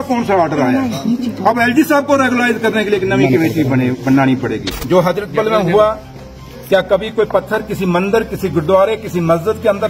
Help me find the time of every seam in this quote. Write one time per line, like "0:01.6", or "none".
0:04.7